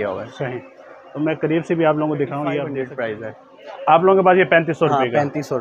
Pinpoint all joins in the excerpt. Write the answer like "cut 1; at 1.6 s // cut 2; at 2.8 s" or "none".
cut 1; at 2.8 s